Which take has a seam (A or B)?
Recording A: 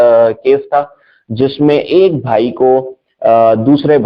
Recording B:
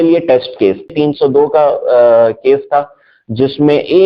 B